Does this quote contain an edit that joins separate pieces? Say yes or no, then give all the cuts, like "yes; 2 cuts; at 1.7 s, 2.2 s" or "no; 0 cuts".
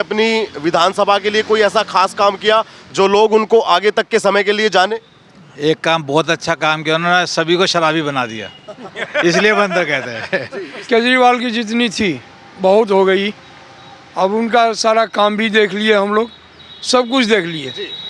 yes; 1 cut; at 10.9 s